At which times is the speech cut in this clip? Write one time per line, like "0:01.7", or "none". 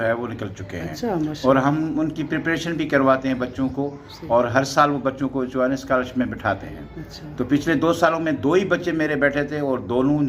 none